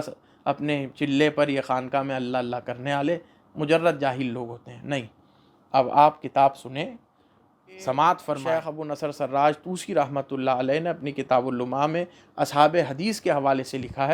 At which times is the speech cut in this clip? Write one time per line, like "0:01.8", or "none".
0:08.5